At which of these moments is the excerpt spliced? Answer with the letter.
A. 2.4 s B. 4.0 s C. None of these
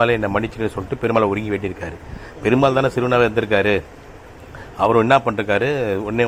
C